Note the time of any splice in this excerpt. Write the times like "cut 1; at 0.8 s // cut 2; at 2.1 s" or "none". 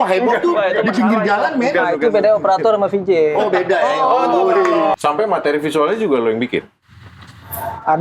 cut 1; at 4.9 s